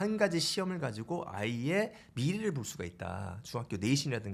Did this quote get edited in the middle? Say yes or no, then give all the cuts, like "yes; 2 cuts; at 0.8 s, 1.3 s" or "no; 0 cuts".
no; 0 cuts